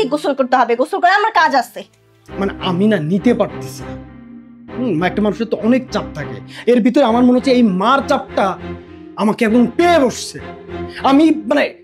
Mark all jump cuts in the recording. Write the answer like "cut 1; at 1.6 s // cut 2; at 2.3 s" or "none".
cut 1; at 2.2 s